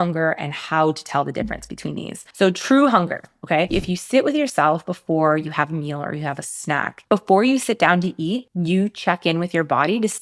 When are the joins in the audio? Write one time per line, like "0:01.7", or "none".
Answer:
0:02.2
0:03.7
0:06.9